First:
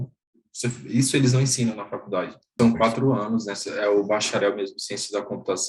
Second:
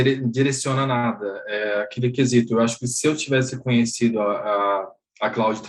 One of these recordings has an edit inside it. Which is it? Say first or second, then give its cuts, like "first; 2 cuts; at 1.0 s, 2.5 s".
first; 1 cut; at 2.5 s